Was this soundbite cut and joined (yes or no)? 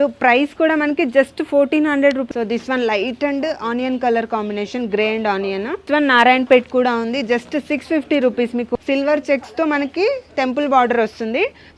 yes